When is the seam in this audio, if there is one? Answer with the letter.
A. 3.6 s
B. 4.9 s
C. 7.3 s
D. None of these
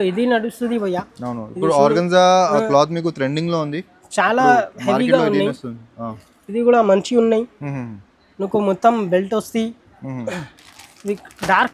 D